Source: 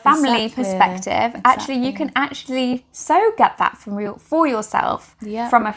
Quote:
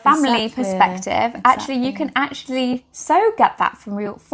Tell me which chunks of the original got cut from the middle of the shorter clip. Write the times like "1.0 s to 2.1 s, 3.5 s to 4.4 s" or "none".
none